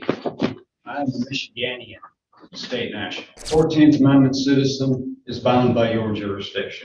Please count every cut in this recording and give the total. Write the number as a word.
one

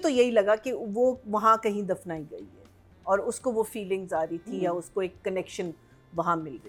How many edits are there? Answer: zero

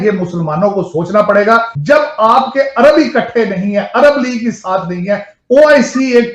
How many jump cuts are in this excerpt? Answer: one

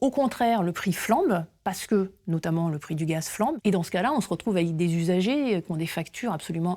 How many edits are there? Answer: one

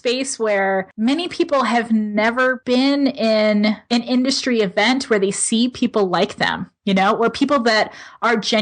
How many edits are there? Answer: three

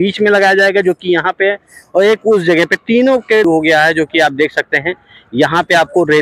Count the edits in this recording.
one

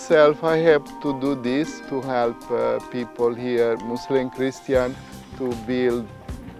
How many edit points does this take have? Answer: one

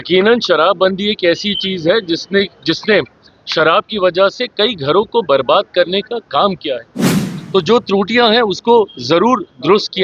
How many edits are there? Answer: one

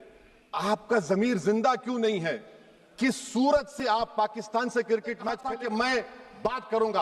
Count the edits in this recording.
one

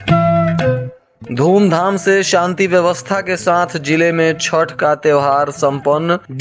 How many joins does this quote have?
one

